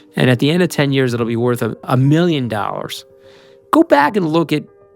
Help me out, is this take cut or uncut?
cut